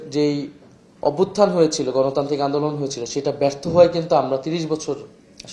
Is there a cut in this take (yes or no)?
no